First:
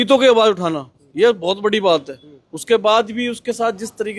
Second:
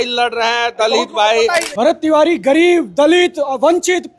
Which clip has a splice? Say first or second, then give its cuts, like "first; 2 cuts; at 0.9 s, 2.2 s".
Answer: second; 1 cut; at 1.7 s